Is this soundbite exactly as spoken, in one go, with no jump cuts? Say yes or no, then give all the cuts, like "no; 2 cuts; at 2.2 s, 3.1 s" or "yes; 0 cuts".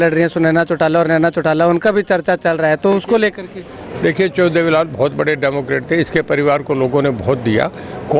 yes; 0 cuts